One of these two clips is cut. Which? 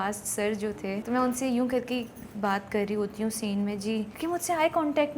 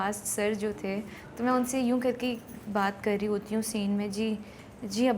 first; 2 cuts; at 1.0 s, 4.1 s

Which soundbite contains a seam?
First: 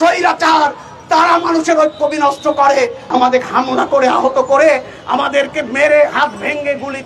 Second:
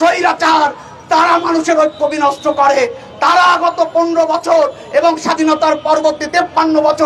first; 1 cut; at 3.0 s

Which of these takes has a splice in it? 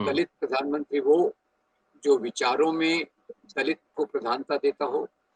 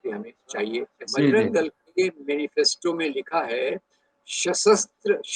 second; 1 cut; at 1.0 s

